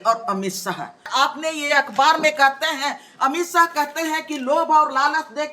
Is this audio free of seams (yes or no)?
no